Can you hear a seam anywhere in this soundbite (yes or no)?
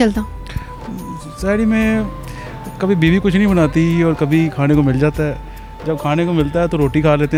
no